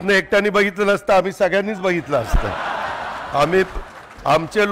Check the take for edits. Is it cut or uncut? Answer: uncut